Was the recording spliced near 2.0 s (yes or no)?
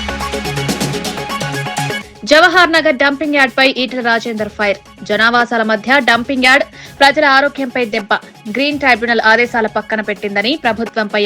yes